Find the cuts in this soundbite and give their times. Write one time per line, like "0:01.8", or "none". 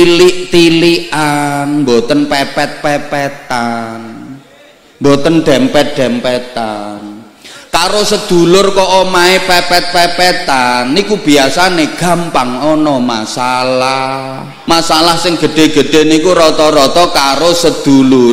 0:14.5